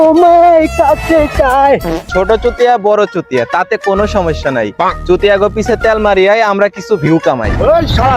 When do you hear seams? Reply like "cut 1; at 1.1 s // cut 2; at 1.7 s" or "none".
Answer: cut 1; at 2.0 s

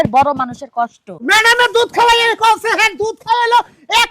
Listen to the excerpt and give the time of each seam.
cut 1; at 1.1 s

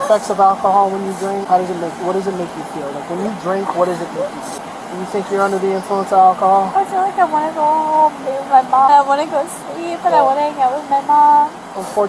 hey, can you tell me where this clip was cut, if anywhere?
cut 1; at 1.4 s // cut 2; at 4.6 s // cut 3; at 8.9 s

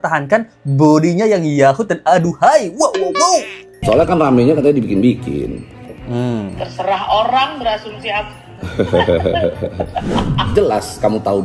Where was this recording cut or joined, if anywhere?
none

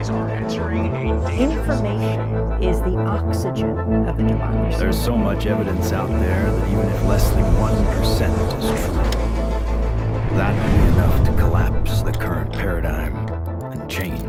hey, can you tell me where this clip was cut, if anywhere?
none

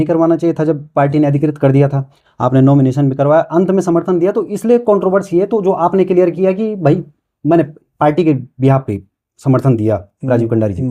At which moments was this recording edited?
none

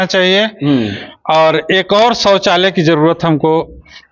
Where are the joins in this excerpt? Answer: none

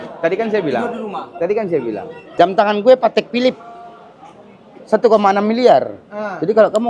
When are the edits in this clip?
cut 1; at 2.2 s

